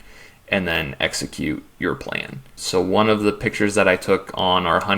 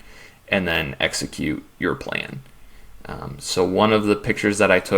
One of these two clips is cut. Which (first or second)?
first